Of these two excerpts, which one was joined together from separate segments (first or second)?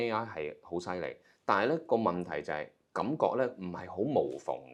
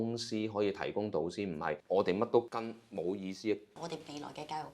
second